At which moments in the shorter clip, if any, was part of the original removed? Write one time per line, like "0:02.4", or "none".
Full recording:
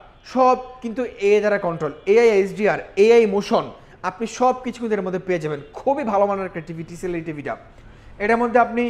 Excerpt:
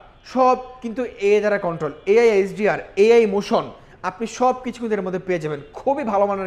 none